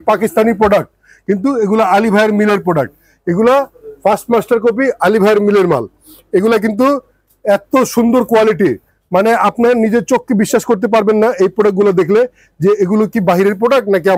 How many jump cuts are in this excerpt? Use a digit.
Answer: 0